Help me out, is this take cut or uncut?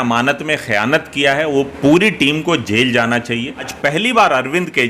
cut